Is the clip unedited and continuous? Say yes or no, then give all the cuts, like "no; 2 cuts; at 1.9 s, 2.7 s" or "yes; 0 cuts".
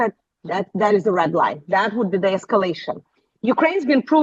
yes; 0 cuts